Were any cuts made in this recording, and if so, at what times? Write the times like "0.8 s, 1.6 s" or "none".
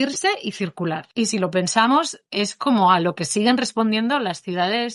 1.0 s